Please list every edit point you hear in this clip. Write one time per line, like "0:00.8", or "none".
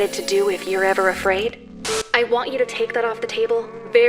0:02.1